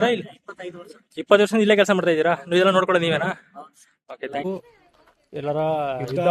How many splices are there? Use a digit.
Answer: 1